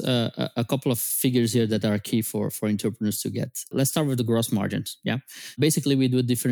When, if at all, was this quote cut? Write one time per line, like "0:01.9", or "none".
0:01.1
0:03.7
0:05.6